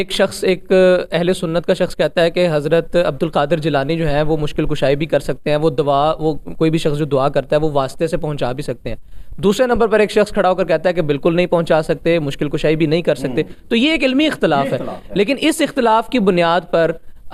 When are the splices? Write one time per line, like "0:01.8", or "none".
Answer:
none